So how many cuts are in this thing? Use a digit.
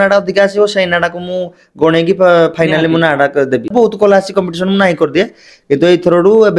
1